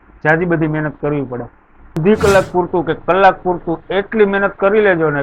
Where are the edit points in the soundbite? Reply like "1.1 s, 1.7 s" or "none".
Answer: 2.0 s